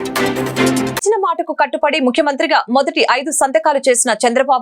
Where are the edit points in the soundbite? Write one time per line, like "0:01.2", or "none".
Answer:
0:01.0